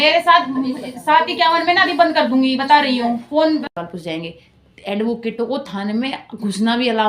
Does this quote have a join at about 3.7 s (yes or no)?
yes